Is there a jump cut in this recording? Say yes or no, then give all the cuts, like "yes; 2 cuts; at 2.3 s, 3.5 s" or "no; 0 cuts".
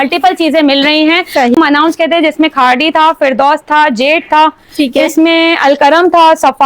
yes; 1 cut; at 1.6 s